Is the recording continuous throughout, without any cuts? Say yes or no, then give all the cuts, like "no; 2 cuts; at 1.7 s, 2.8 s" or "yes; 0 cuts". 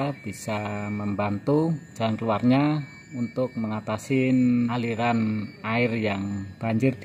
no; 2 cuts; at 1.9 s, 4.7 s